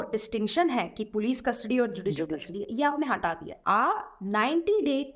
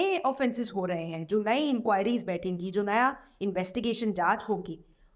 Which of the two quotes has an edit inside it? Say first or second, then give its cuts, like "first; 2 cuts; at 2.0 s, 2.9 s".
first; 1 cut; at 3.5 s